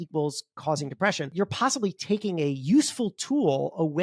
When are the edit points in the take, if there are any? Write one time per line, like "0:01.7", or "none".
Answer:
0:01.3